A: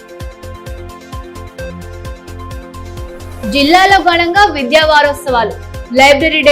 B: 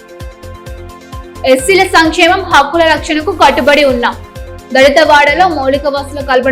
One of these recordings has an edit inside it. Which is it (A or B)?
A